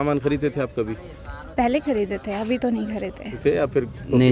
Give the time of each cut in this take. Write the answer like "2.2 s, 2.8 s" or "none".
3.3 s